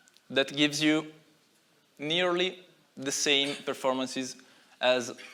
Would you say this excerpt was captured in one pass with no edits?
yes; 0 cuts

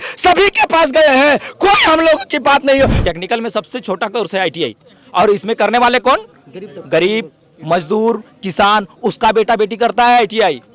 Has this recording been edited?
yes; 1 cut; at 3.0 s

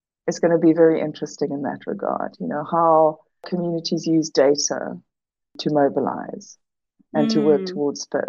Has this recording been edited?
yes; 1 cut; at 3.5 s

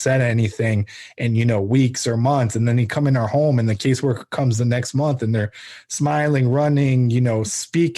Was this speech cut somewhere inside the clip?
no; 0 cuts

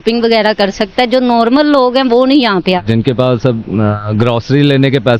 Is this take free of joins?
no; 1 cut; at 2.8 s

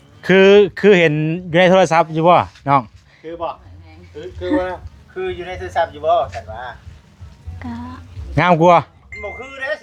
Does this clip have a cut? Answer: no; 0 cuts

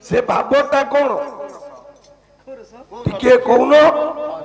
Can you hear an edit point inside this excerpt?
no; 0 cuts

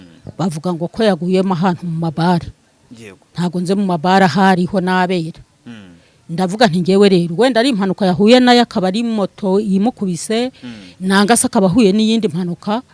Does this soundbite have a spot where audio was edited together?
no; 0 cuts

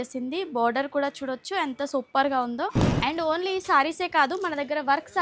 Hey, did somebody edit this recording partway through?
yes; 1 cut; at 2.8 s

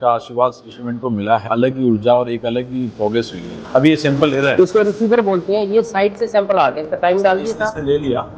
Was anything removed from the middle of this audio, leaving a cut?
yes; 2 cuts; at 1.4 s, 3.5 s

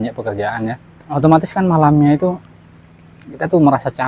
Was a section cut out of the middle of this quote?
yes; 1 cut; at 1.1 s

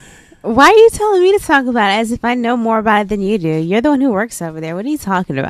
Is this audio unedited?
no; 1 cut; at 3.2 s

